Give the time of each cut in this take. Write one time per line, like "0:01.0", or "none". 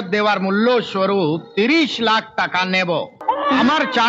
0:03.1